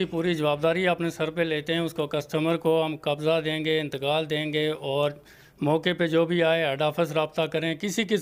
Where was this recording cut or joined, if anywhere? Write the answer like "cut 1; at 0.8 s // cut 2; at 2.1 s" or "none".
none

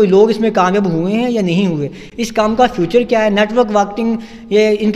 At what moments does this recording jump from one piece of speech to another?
none

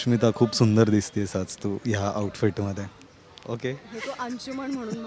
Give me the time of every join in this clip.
none

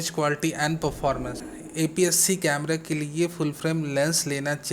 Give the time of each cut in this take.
cut 1; at 1.8 s

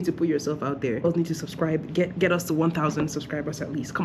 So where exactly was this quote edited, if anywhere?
cut 1; at 1.0 s

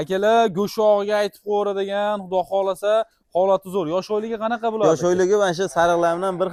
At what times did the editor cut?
none

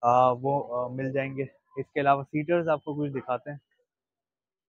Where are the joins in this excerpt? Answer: none

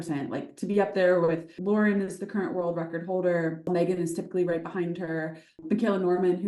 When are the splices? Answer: cut 1; at 1.5 s // cut 2; at 3.6 s // cut 3; at 5.6 s

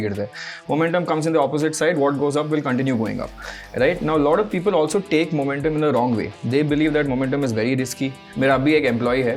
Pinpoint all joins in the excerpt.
cut 1; at 8.2 s

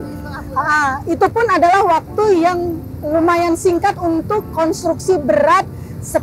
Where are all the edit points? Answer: none

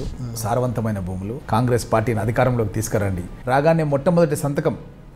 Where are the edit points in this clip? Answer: cut 1; at 1.3 s // cut 2; at 3.3 s

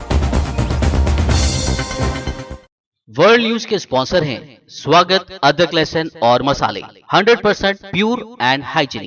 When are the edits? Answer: cut 1; at 2.6 s

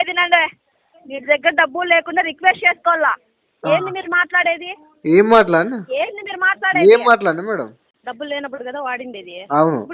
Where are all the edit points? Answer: cut 1; at 7.9 s

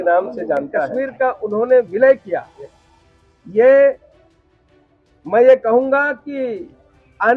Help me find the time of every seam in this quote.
cut 1; at 0.9 s

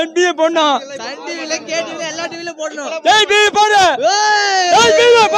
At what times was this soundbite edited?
none

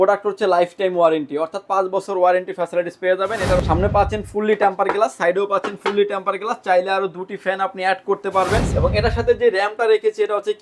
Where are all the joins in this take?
cut 1; at 3.6 s // cut 2; at 8.7 s

